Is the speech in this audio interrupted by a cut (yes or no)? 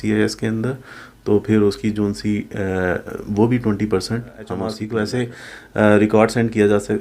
yes